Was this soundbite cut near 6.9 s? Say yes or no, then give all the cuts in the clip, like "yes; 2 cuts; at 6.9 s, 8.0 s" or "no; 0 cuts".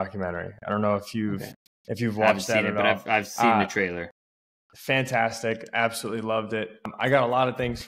yes; 1 cut; at 6.9 s